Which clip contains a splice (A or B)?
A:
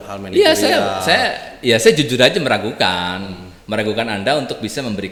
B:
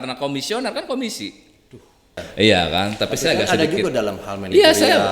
B